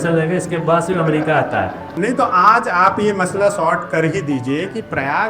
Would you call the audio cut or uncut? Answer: cut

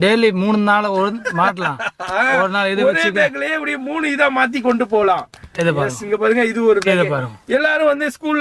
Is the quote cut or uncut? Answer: uncut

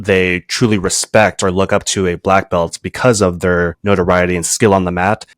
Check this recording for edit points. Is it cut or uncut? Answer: cut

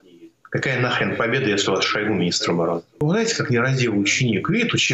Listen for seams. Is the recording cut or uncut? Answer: cut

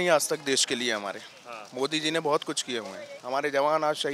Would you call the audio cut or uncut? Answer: uncut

